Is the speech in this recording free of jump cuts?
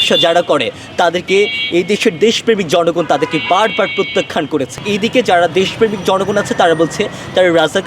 no; 1 cut; at 4.7 s

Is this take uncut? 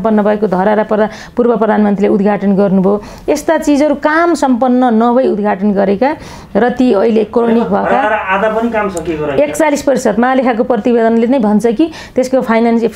yes; 0 cuts

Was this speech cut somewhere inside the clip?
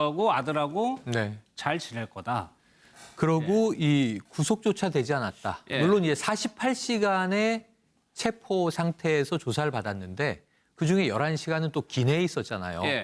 no; 0 cuts

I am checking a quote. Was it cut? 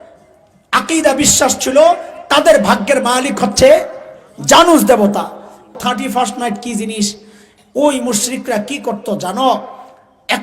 yes; 1 cut; at 5.7 s

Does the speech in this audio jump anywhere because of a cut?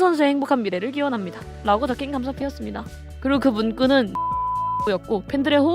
yes; 1 cut; at 4.3 s

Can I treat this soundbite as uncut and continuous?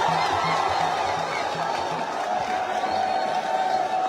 yes; 0 cuts

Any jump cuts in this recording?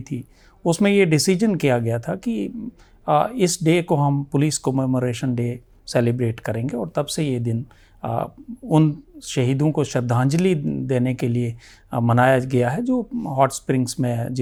no; 0 cuts

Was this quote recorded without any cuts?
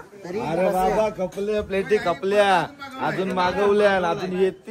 yes; 0 cuts

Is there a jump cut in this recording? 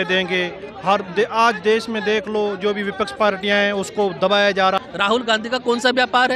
yes; 1 cut; at 4.8 s

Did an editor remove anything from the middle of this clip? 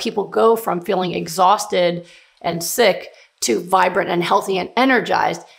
no; 0 cuts

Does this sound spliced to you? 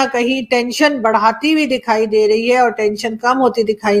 no; 0 cuts

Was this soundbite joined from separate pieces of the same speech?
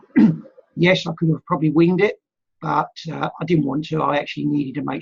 no; 0 cuts

